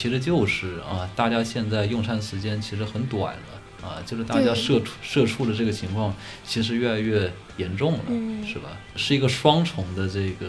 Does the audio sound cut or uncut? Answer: cut